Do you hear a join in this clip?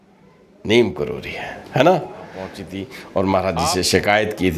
yes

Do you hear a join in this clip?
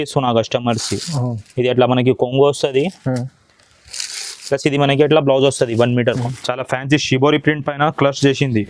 yes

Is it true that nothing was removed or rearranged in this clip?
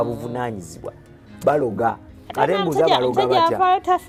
yes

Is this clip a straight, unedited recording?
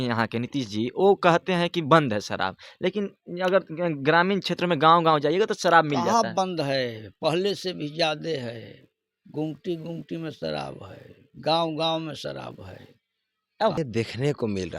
no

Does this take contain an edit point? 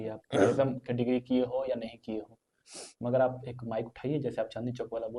no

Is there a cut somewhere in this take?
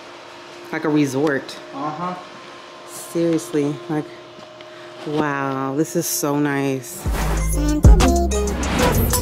yes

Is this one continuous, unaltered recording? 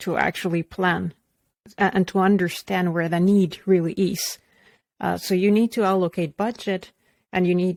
yes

